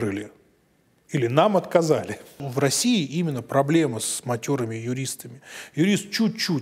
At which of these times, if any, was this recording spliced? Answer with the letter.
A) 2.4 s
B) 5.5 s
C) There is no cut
A